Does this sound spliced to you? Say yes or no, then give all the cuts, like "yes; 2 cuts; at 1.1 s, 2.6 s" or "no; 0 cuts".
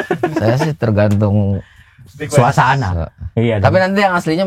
no; 0 cuts